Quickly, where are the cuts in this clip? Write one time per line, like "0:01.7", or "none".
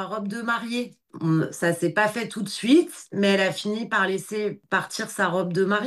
0:01.0
0:04.6

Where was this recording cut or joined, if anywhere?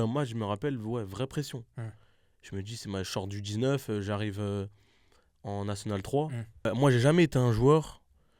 0:06.7

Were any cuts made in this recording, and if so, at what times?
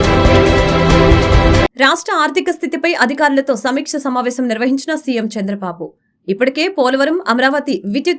0:01.6

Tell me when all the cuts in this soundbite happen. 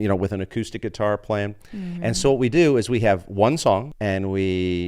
0:03.9

